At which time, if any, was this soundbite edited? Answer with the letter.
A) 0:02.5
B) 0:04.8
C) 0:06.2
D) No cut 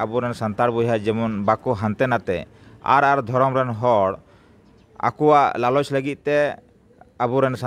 D